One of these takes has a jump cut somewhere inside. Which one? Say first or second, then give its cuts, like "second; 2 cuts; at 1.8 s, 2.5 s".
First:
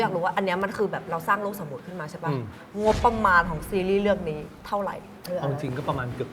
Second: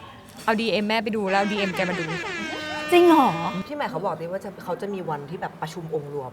second; 1 cut; at 3.5 s